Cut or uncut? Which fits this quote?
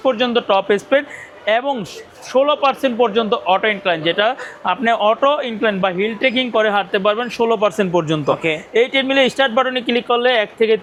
uncut